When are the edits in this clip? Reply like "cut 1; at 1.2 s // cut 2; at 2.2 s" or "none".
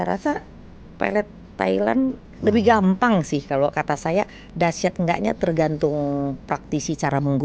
cut 1; at 2.3 s